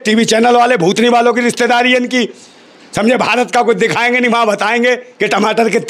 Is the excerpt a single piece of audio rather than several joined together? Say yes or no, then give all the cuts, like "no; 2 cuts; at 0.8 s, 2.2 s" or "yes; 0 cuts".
yes; 0 cuts